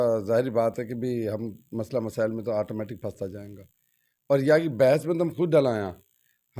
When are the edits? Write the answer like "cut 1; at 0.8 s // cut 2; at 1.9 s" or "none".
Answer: none